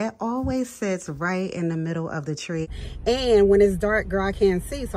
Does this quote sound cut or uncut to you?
cut